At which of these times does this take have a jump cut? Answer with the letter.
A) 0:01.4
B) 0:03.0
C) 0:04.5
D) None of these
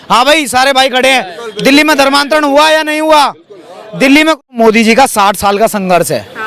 C